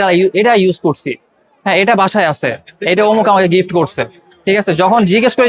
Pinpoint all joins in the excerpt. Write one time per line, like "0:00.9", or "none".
none

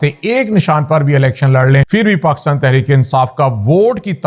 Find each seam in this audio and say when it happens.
0:01.8

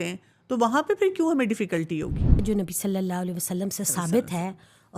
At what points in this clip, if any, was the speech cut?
0:02.4

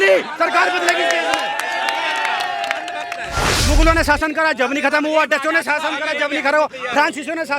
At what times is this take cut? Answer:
0:03.5

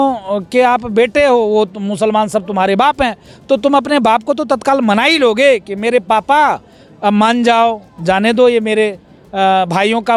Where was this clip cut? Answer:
none

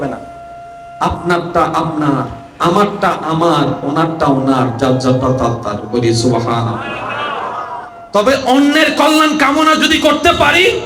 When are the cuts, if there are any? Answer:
none

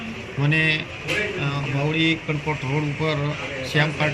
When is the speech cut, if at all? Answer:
none

